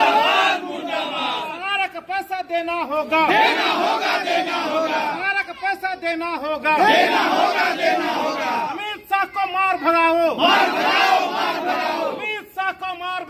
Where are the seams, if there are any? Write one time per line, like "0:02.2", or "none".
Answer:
none